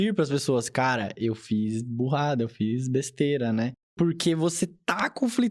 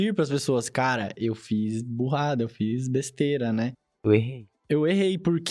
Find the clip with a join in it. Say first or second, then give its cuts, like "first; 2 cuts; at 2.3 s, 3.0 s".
first; 1 cut; at 3.9 s